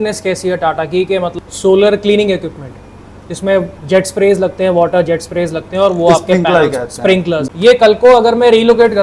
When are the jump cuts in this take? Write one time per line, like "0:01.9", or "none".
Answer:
0:01.3
0:07.5